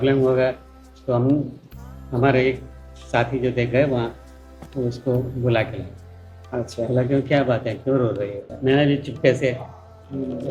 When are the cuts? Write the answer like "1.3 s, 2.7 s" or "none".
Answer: 8.5 s